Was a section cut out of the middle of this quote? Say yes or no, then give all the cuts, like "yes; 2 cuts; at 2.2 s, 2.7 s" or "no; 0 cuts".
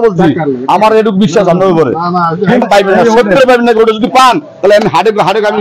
yes; 1 cut; at 2.6 s